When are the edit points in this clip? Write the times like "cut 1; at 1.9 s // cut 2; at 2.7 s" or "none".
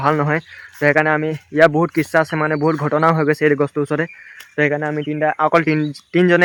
none

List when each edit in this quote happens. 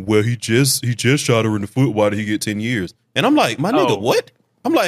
none

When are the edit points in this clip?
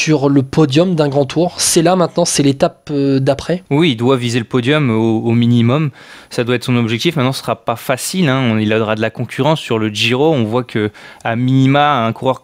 none

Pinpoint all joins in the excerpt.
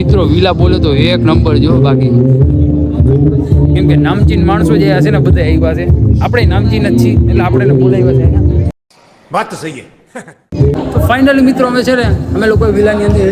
cut 1; at 10.7 s

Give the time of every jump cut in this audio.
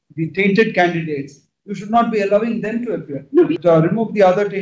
cut 1; at 3.5 s

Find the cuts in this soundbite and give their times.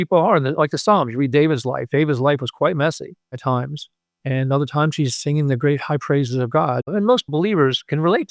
cut 1; at 7.3 s

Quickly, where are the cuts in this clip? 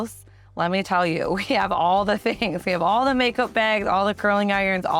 none

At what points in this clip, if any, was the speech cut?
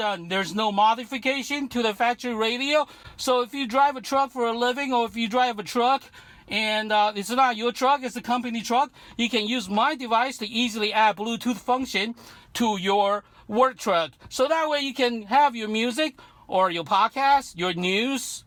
none

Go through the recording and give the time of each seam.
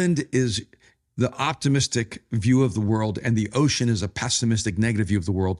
none

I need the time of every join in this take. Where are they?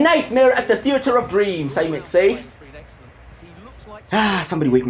cut 1; at 2.7 s // cut 2; at 4.1 s

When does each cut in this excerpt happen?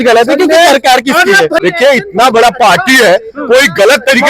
cut 1; at 1.6 s

